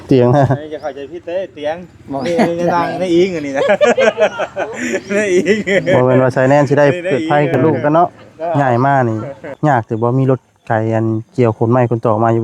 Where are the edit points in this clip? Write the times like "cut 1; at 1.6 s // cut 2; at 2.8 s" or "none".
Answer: cut 1; at 8.5 s